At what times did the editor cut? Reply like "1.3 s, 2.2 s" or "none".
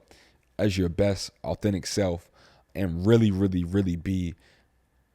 2.6 s

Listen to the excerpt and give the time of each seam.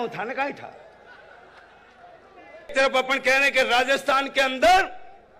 2.7 s

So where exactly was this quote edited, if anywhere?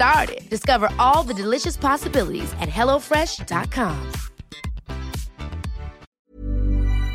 6.2 s

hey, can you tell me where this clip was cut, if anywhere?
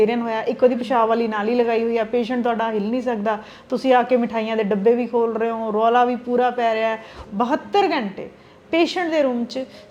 7.2 s

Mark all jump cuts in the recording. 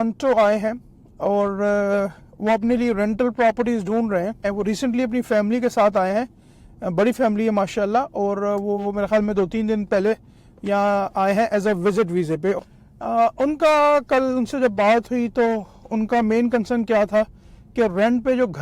4.5 s, 12.6 s

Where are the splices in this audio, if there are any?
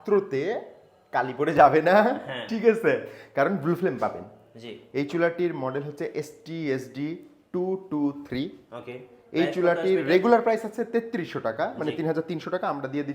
none

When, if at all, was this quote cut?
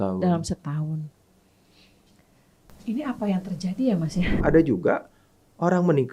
4.4 s

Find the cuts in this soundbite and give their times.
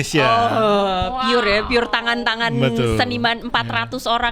none

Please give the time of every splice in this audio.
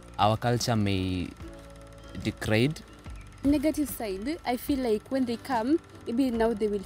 3.4 s

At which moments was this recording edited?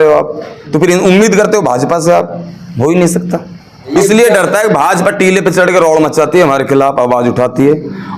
3.9 s

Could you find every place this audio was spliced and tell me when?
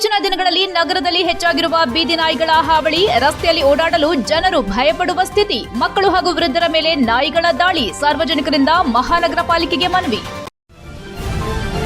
10.4 s

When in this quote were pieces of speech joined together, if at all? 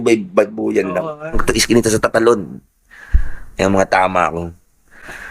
1.4 s

